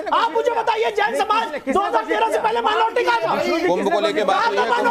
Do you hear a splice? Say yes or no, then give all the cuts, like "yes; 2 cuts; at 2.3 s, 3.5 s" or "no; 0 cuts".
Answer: no; 0 cuts